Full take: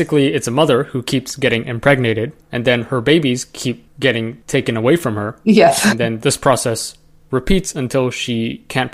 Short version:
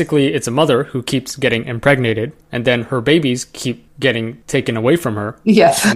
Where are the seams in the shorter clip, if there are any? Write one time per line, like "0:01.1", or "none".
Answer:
none